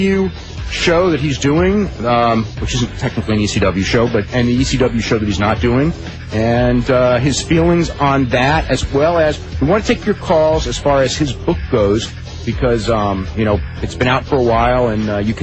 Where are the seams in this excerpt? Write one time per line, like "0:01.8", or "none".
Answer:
none

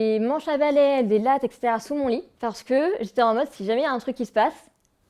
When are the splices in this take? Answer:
0:02.3

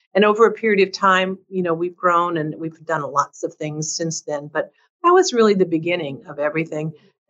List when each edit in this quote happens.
none

